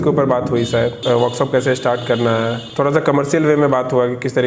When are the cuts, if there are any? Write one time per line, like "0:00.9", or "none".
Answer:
0:01.0
0:02.6